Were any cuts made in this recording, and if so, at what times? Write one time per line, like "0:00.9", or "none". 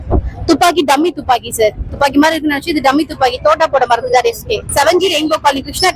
0:01.9
0:04.5